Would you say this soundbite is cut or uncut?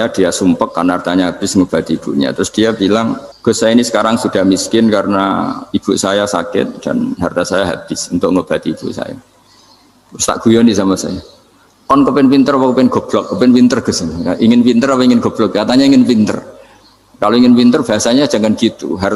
cut